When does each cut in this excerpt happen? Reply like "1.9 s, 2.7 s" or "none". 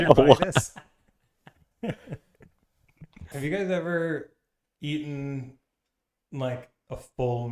3.3 s